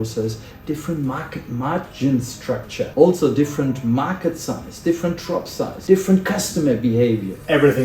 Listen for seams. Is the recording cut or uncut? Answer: cut